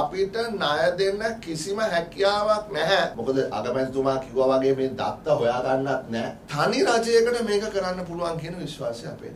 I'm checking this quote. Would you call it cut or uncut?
cut